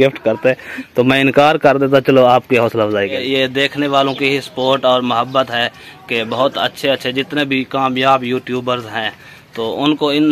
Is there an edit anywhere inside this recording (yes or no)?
yes